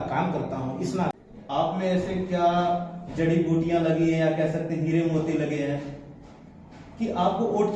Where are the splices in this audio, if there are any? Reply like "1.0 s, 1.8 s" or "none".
1.1 s